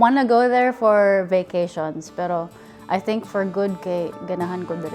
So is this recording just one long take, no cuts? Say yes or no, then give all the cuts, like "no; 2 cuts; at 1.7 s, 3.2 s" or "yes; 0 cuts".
yes; 0 cuts